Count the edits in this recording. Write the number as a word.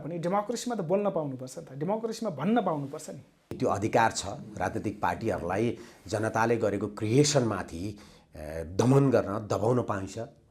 one